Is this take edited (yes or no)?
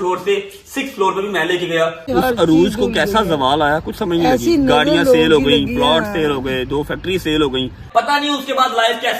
yes